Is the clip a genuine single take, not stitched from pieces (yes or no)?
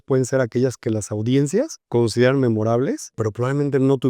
no